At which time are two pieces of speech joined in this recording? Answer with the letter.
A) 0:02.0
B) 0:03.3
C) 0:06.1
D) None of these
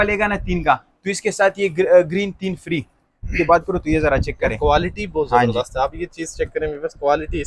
B